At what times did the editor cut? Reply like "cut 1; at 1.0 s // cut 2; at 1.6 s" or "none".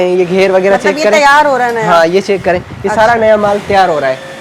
none